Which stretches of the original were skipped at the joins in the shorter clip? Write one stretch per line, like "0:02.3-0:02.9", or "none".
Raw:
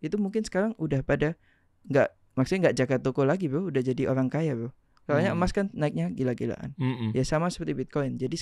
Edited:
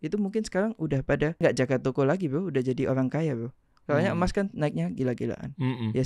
0:01.4-0:02.6